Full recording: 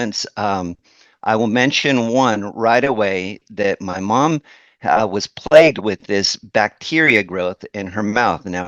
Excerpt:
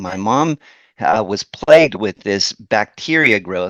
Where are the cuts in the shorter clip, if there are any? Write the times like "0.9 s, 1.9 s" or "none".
none